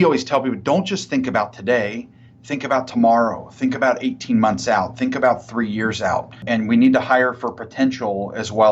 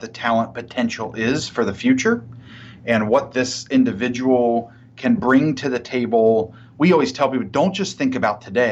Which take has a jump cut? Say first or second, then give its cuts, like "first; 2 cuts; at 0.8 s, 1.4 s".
first; 1 cut; at 6.4 s